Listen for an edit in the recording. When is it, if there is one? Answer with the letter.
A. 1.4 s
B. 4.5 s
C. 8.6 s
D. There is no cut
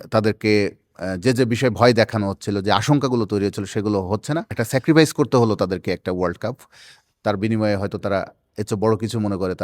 B